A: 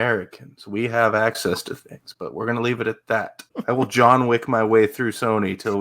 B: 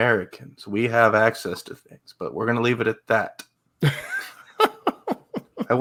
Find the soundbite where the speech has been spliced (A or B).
A